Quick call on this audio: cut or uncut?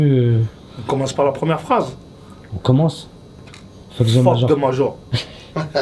cut